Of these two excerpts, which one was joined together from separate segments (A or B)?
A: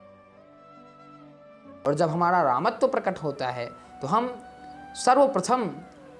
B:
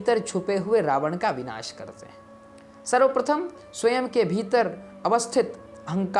A